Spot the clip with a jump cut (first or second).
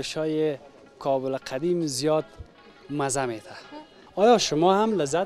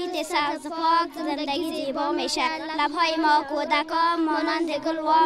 first